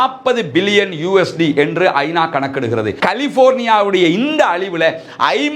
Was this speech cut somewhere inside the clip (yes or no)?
yes